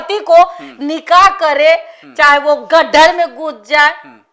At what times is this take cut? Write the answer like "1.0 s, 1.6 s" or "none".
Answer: none